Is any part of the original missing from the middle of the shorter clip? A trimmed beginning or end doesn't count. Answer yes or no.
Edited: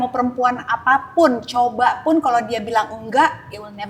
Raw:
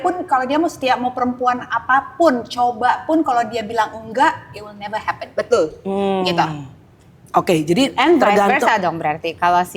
no